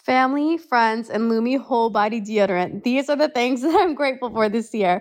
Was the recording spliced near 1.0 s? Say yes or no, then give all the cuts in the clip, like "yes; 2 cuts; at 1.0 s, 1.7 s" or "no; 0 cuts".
no; 0 cuts